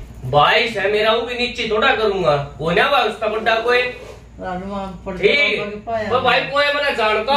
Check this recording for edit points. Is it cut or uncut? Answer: uncut